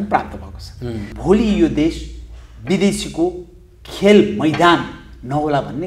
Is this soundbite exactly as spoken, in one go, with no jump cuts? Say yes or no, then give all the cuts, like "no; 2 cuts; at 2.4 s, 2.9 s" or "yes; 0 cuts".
no; 1 cut; at 1.1 s